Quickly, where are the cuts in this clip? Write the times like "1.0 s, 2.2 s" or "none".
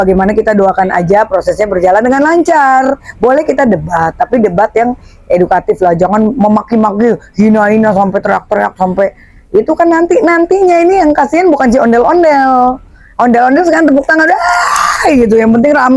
3.1 s